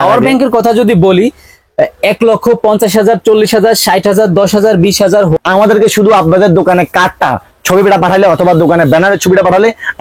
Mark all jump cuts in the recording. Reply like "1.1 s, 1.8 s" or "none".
5.4 s